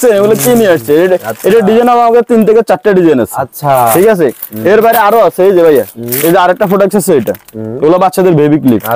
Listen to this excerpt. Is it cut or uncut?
uncut